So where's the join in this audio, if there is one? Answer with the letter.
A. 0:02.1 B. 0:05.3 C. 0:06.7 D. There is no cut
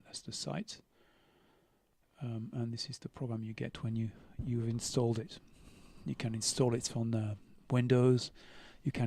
D